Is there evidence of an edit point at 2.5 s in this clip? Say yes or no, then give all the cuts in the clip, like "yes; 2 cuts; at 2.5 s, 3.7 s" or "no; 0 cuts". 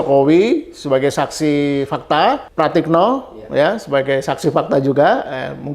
yes; 1 cut; at 2.5 s